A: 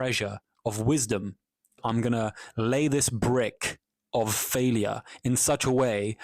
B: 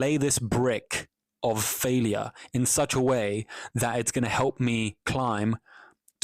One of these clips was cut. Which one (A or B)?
A